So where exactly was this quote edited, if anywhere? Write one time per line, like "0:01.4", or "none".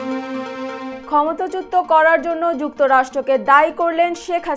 0:00.9